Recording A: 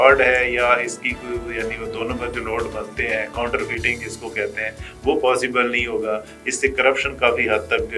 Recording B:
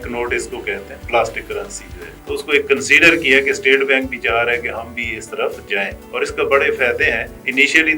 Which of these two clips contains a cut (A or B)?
B